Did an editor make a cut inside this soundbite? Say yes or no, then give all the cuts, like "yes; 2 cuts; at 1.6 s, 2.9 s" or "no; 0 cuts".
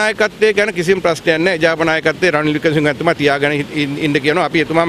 no; 0 cuts